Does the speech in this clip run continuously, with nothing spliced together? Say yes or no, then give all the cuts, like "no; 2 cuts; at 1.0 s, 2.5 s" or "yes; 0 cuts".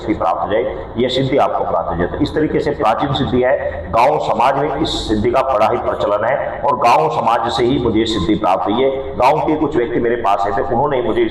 yes; 0 cuts